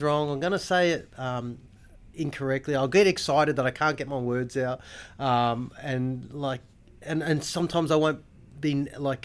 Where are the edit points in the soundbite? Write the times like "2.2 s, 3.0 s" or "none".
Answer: none